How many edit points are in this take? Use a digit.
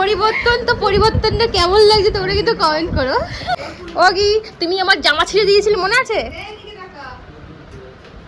1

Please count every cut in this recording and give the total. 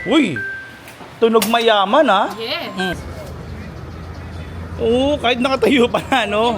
1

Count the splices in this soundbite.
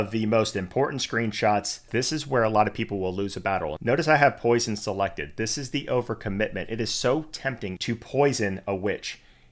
3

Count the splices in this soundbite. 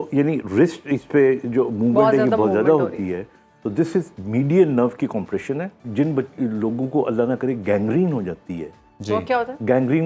1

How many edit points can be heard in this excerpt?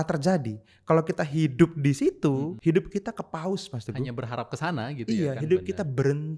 1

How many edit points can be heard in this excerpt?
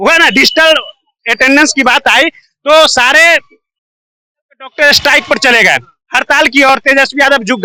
0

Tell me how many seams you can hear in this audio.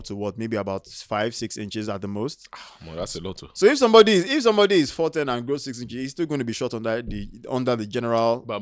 0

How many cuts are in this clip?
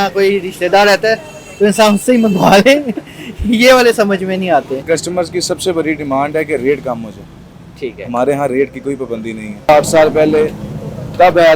2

